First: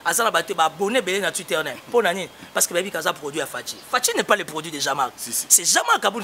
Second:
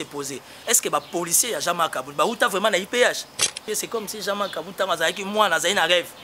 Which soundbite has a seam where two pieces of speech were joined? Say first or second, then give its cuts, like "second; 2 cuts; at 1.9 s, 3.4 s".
second; 1 cut; at 3.6 s